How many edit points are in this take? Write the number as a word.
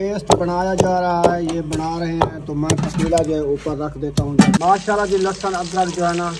one